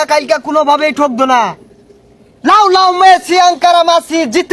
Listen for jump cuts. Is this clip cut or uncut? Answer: uncut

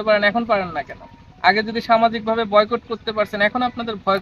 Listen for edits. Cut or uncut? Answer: uncut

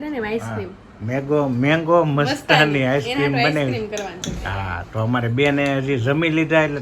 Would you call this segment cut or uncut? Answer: uncut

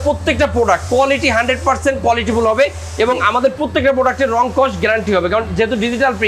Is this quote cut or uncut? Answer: uncut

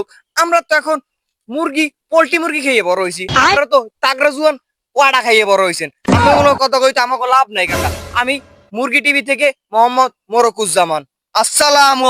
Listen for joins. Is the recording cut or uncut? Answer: uncut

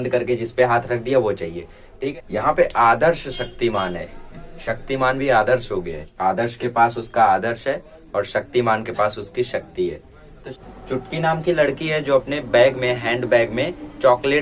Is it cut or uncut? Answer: cut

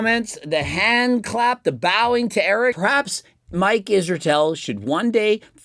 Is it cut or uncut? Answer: cut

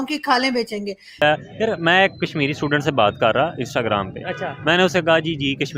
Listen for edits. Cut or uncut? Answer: cut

